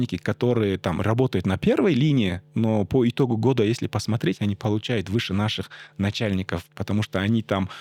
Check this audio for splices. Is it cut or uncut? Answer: uncut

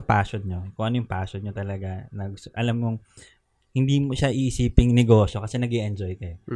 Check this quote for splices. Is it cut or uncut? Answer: uncut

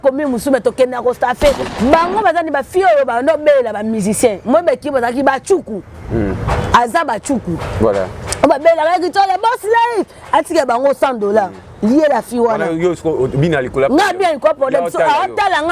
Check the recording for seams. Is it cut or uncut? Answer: cut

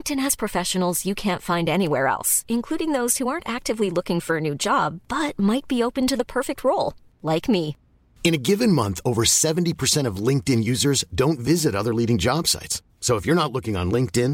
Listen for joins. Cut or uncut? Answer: uncut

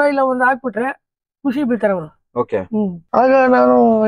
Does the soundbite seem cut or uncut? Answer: cut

